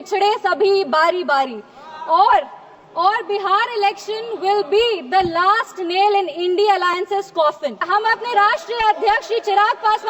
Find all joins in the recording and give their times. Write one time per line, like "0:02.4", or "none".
0:07.8